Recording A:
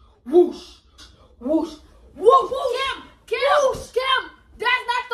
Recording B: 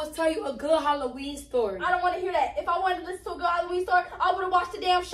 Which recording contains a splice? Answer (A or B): A